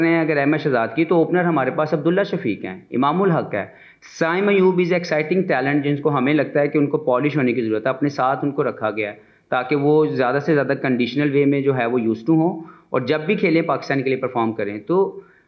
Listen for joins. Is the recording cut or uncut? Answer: uncut